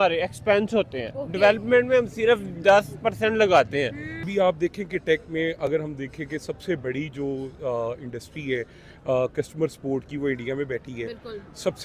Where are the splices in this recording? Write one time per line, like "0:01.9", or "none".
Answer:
0:04.2